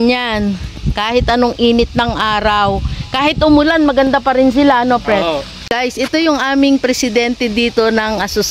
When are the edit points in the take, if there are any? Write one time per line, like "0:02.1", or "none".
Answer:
0:05.7